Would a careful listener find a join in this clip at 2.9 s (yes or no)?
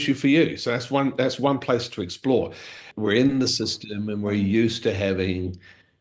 yes